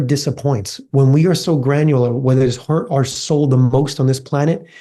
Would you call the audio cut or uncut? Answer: uncut